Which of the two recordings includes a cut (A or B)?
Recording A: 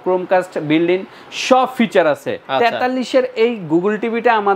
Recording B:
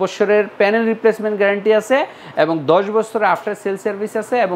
A